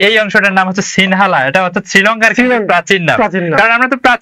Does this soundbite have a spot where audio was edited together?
no; 0 cuts

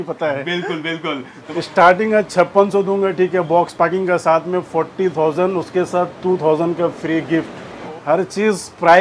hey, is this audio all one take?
no; 2 cuts; at 1.5 s, 7.8 s

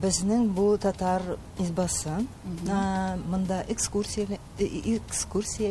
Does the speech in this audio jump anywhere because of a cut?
no; 0 cuts

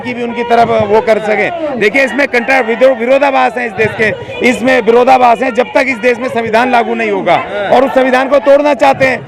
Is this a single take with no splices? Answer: yes; 0 cuts

